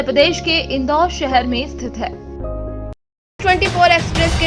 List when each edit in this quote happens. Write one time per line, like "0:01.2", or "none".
0:03.0